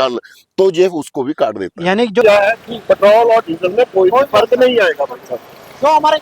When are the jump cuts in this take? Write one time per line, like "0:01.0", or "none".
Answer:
0:02.2